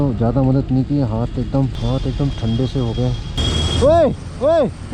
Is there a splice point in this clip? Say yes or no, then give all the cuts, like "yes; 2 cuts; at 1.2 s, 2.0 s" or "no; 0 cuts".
yes; 2 cuts; at 1.8 s, 3.4 s